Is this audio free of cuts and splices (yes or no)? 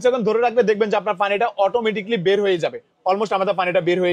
yes